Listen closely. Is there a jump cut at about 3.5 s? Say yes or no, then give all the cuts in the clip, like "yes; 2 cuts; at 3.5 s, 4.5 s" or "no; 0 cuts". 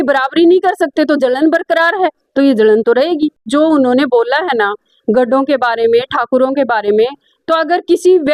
yes; 1 cut; at 3.5 s